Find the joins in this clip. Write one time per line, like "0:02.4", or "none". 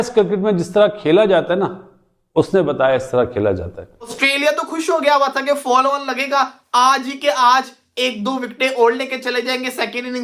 0:04.2